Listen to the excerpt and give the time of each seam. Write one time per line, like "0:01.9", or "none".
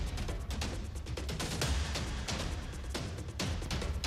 0:01.7